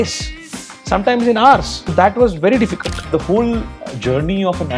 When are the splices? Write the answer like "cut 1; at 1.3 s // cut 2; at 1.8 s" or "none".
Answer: cut 1; at 1.8 s // cut 2; at 3.0 s